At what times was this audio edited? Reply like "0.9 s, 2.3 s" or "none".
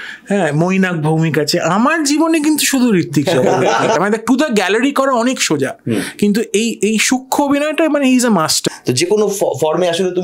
4.0 s, 8.6 s

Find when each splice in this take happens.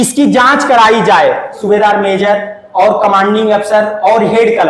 1.6 s

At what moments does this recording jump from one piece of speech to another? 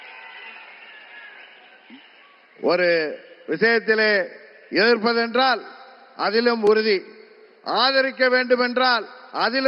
1.8 s

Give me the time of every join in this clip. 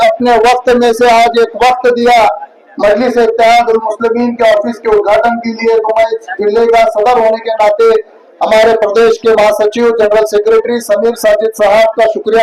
none

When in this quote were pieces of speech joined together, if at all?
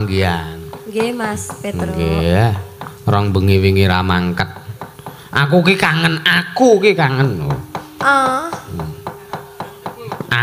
none

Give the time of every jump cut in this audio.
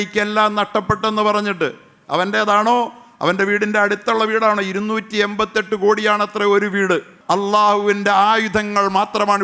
7.1 s

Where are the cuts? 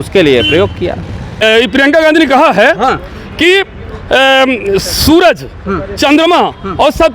1.4 s

